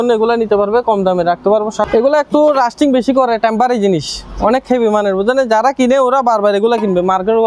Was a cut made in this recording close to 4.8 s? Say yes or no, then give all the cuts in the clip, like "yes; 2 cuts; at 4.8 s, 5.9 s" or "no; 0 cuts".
no; 1 cut; at 1.8 s